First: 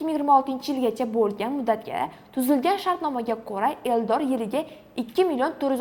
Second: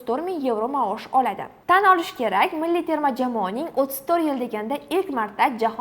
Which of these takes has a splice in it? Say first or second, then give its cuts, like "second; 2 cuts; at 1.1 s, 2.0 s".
second; 1 cut; at 1.6 s